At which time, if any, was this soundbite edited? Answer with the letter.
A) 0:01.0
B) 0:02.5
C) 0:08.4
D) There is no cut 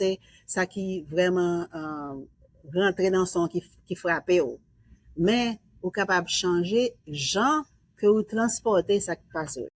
D